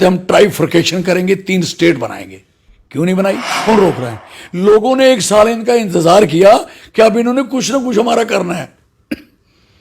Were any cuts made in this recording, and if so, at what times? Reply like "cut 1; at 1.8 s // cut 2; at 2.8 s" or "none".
cut 1; at 3.5 s